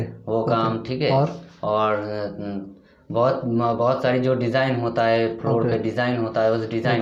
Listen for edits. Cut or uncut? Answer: uncut